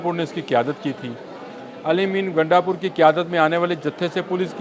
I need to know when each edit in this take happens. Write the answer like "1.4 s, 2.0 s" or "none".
none